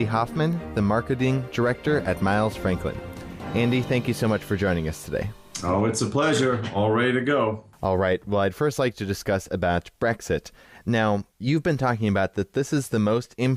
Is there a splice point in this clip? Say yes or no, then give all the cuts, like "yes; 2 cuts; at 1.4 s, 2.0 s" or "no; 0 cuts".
no; 0 cuts